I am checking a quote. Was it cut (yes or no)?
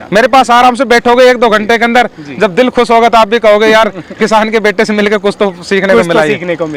no